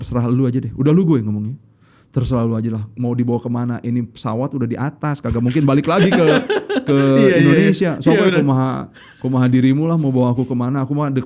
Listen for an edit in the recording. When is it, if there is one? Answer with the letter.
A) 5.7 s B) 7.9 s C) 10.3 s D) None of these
D